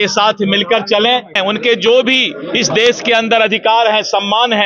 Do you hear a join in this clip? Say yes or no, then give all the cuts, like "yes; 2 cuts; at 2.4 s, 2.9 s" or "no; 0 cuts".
yes; 1 cut; at 1.4 s